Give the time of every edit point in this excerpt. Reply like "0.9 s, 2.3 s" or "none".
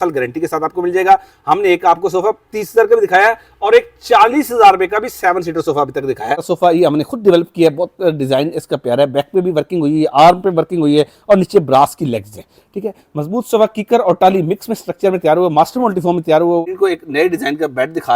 6.5 s, 16.6 s